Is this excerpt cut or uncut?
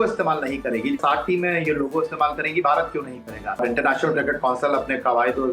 cut